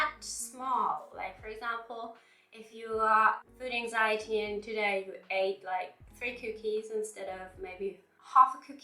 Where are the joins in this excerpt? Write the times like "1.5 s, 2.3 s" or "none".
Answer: none